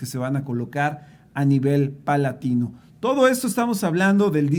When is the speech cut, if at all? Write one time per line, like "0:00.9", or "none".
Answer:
none